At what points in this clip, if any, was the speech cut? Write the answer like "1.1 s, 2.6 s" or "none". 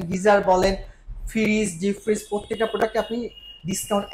none

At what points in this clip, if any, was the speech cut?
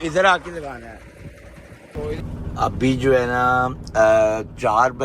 2.2 s

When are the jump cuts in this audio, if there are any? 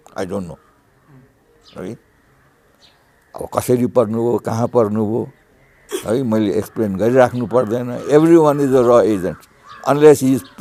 none

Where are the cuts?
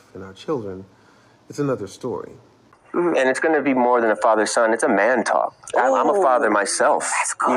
2.8 s

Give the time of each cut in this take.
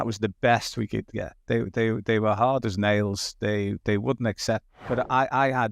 4.8 s

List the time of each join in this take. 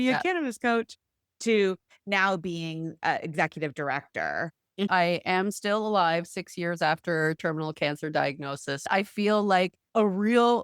4.9 s, 8.8 s, 9.8 s

